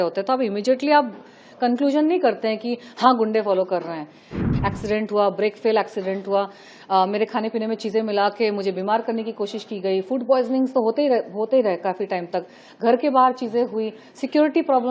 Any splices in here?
yes; 1 cut; at 4.3 s

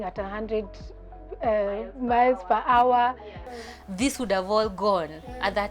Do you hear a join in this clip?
yes; 1 cut; at 3.5 s

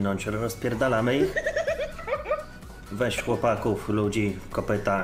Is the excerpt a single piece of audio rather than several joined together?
no; 1 cut; at 2.8 s

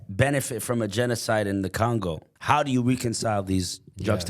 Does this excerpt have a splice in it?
yes; 1 cut; at 2.3 s

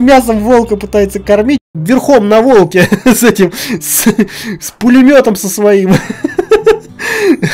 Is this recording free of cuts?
no; 1 cut; at 1.7 s

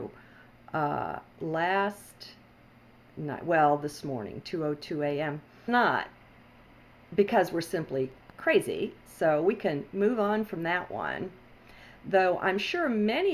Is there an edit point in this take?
no; 0 cuts

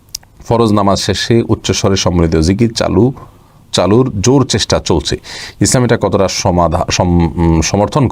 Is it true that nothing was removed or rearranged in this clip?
yes; 0 cuts

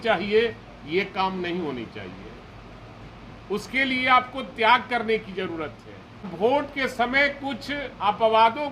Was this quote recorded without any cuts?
no; 1 cut; at 6.3 s

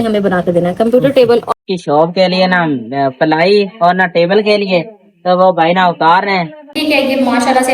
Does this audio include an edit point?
yes; 2 cuts; at 1.5 s, 6.8 s

